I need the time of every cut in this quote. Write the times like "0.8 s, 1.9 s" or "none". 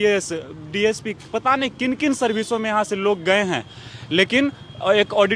none